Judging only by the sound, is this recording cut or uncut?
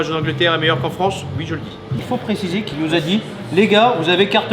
cut